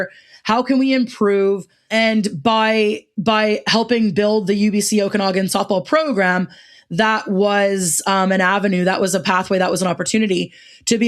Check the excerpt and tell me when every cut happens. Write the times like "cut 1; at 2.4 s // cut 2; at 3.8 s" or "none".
cut 1; at 1.8 s